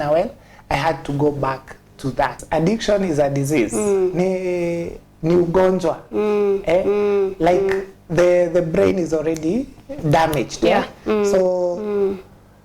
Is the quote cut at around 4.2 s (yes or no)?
no